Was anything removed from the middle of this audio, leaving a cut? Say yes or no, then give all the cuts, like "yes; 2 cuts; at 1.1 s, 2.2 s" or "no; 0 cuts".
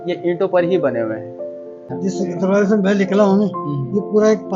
yes; 1 cut; at 1.9 s